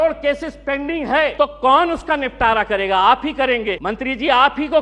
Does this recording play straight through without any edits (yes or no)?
no